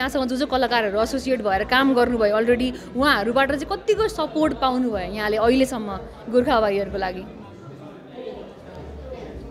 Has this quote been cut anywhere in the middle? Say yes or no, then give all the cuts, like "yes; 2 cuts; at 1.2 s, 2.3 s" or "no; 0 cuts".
no; 0 cuts